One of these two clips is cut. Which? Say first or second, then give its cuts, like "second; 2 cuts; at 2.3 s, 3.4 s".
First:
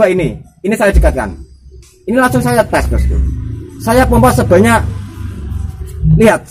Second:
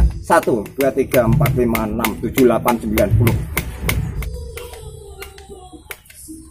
second; 1 cut; at 4.2 s